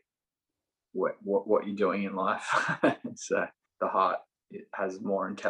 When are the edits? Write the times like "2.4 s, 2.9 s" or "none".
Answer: 3.6 s